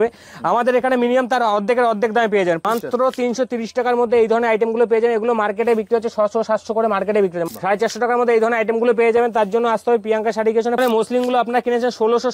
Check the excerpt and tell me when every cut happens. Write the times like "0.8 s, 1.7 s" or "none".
2.6 s, 7.5 s, 10.8 s